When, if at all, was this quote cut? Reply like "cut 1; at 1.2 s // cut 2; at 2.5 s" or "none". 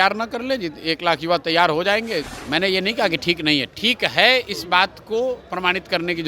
cut 1; at 2.4 s